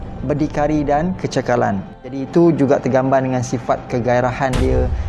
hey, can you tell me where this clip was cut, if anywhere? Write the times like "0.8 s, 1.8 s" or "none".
2.2 s

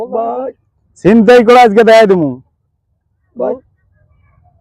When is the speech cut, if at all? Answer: 2.1 s

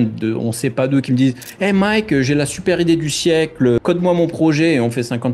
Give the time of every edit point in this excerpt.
3.8 s

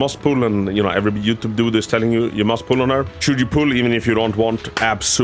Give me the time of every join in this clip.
none

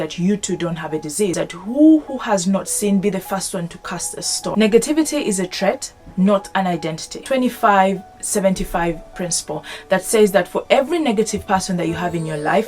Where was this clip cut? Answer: 1.3 s, 4.5 s, 7.2 s

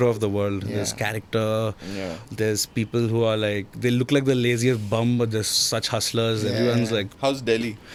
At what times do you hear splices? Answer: none

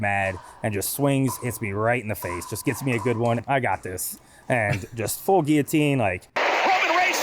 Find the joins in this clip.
3.4 s

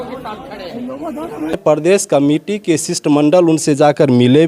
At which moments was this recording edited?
1.9 s

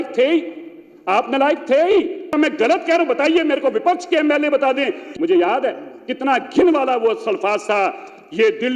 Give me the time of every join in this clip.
2.2 s, 5.0 s

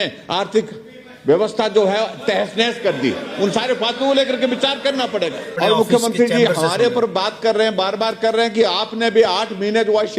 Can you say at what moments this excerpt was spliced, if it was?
5.5 s

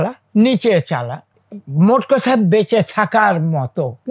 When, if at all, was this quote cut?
none

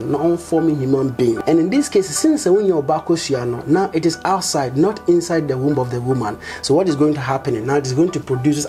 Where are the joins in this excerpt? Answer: 1.4 s

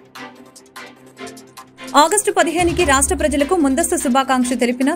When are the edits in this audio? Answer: 1.9 s

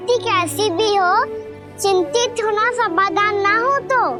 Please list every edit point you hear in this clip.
none

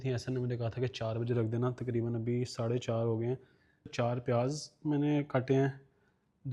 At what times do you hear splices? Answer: 3.9 s

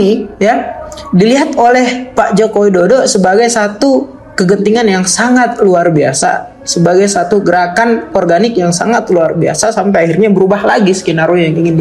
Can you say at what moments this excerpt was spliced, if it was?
none

